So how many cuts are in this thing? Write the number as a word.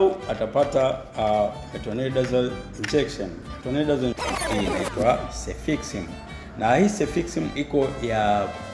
one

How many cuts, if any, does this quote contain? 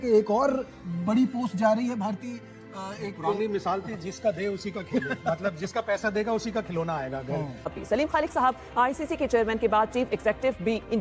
one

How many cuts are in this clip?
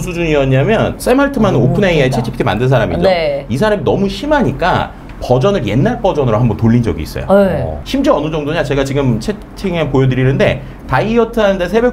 two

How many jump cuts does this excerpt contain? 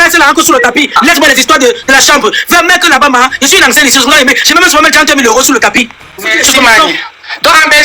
zero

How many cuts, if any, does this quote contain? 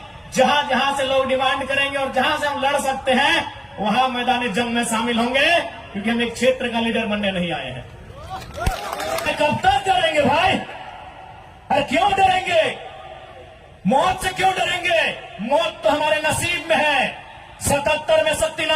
one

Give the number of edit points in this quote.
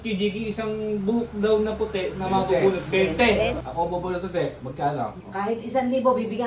two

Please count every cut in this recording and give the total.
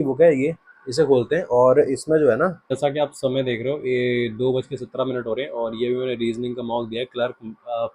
one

